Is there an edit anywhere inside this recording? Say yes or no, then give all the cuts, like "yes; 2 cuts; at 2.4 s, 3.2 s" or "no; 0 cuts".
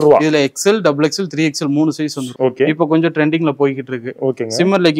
yes; 1 cut; at 2.2 s